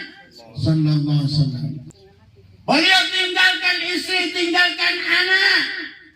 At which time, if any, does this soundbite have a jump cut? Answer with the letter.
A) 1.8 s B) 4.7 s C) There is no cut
A